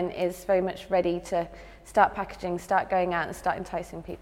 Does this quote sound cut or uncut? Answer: uncut